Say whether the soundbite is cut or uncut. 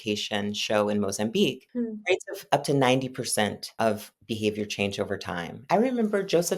cut